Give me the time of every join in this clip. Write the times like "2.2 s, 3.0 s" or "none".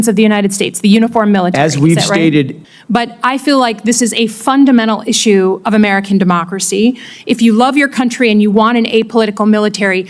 2.5 s